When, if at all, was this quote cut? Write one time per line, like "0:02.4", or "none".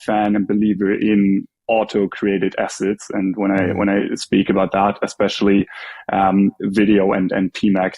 none

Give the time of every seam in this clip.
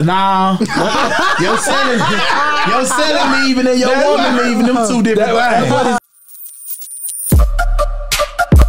0:06.0

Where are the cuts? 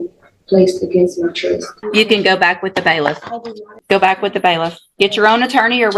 0:01.8
0:03.7

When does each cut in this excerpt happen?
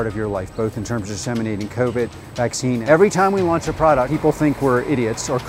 0:02.8
0:04.1

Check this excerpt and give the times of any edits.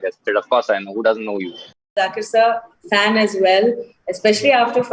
0:01.9

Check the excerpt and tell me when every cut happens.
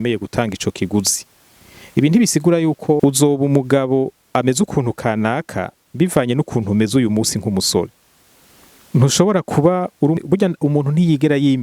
0:03.0
0:10.2

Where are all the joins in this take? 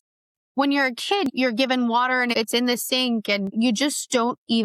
0:01.3
0:02.3
0:03.5

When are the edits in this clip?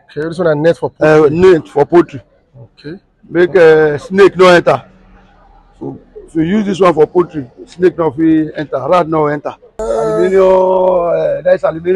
0:09.8

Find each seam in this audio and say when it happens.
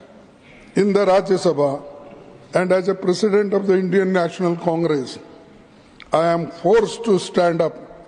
none

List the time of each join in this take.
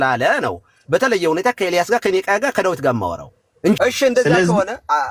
0:03.8

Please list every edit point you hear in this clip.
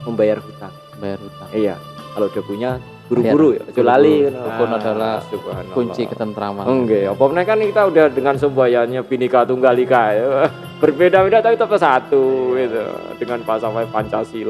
0:04.4

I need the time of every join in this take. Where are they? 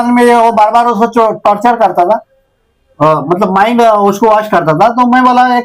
none

